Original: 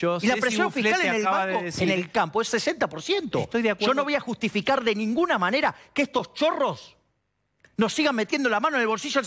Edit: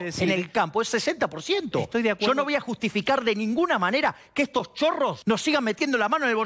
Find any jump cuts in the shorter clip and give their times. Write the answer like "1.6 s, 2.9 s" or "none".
5.2 s